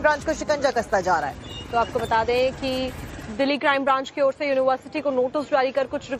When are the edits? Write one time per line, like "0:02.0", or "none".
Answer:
none